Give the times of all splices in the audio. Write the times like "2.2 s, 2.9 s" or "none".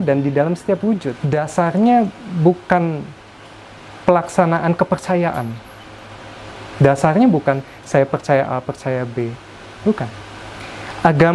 1.2 s